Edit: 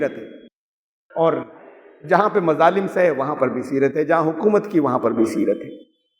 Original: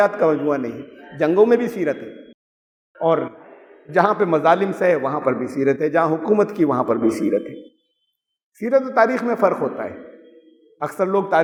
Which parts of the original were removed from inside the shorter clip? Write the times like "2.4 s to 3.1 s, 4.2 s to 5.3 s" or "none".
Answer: none

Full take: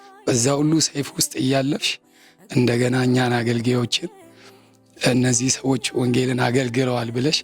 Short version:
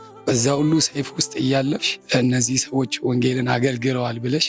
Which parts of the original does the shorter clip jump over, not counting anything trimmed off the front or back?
1.9 s to 4.9 s

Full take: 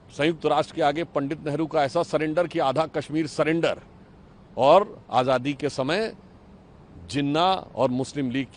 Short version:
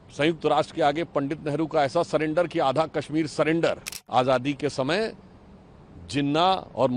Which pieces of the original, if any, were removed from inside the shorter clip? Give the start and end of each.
4.0 s to 5.0 s

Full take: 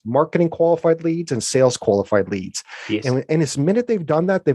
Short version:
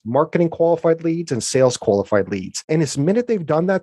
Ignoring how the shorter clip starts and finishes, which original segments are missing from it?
2.6 s to 3.2 s

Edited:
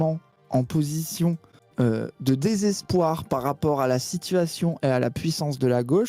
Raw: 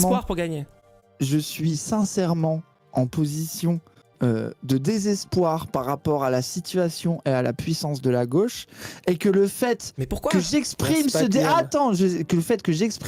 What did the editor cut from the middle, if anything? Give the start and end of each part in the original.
none

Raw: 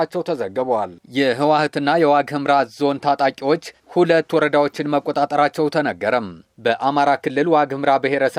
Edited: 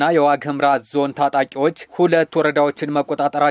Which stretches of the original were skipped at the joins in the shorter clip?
3.7 s to 3.8 s

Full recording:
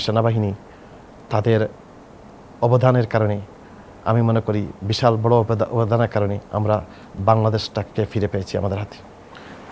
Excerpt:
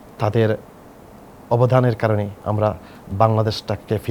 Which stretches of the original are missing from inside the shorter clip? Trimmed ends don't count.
3.5 s to 6.5 s

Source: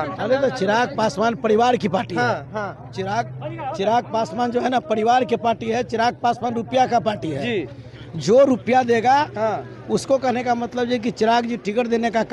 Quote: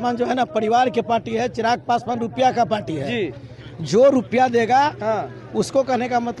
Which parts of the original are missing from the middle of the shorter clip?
none

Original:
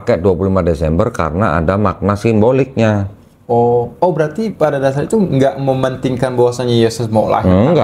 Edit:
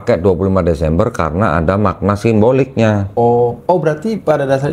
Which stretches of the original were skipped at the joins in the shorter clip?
3.1 s to 3.4 s

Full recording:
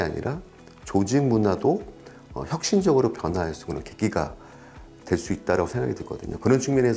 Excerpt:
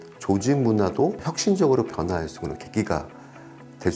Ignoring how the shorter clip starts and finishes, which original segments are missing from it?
1.9 s to 2.5 s

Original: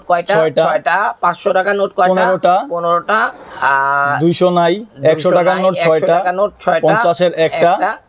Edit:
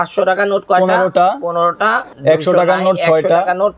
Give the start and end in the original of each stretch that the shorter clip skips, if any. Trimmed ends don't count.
3.4 s to 4.9 s

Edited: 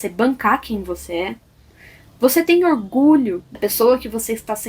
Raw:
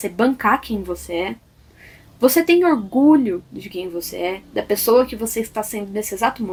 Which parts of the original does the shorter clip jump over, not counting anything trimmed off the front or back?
3.6 s to 4.6 s

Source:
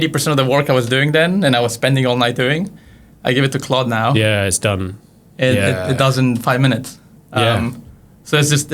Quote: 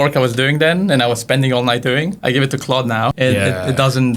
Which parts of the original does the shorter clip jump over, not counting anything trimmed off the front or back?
2.7 s to 3.2 s, 4.1 s to 5.3 s

